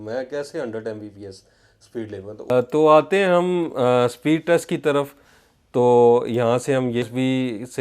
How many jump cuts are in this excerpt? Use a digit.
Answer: 2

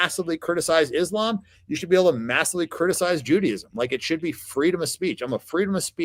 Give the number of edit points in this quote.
0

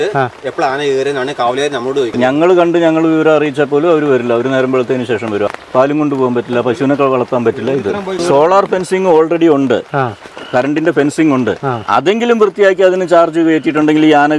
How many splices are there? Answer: 3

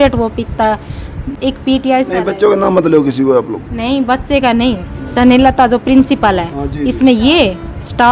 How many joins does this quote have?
0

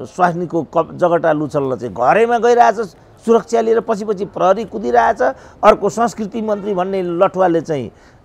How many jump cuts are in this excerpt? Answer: 0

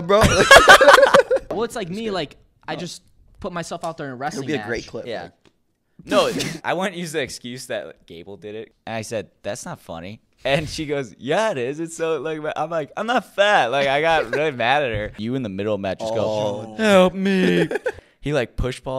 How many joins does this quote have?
5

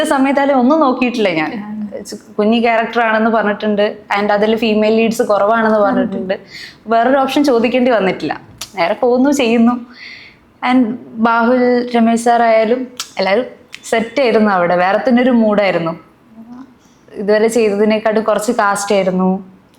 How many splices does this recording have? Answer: 0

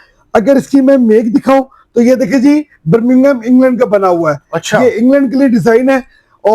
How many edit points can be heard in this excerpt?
0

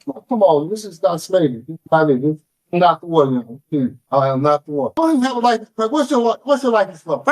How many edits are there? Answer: 1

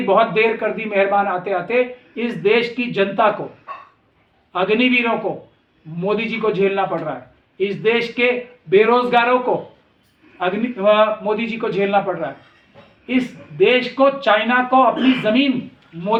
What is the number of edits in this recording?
0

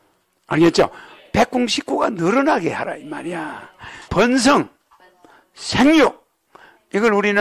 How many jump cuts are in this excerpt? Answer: 1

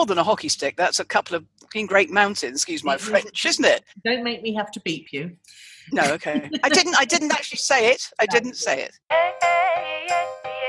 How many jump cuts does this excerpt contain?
1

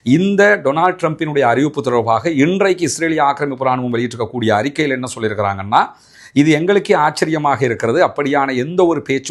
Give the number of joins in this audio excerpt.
0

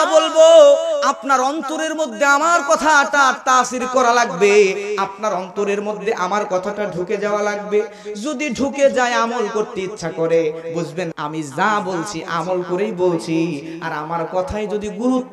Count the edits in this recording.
1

